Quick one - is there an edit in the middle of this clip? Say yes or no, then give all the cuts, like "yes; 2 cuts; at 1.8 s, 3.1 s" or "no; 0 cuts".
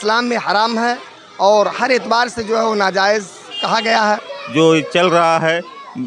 yes; 1 cut; at 4.4 s